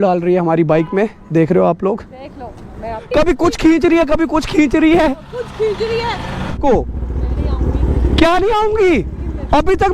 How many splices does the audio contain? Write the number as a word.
two